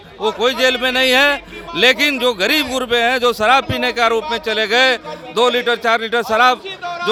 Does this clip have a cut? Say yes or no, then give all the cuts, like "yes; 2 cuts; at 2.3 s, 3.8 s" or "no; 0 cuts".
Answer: no; 0 cuts